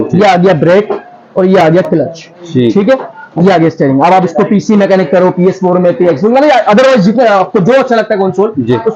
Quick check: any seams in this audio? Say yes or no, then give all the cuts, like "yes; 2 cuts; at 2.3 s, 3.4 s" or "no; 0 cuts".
no; 0 cuts